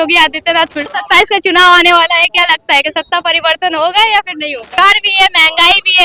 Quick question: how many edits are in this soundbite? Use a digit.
2